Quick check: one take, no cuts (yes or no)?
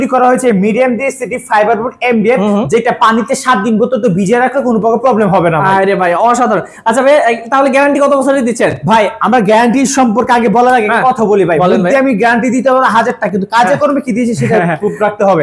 yes